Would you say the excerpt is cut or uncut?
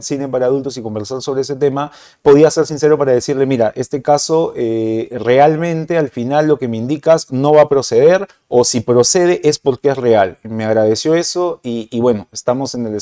uncut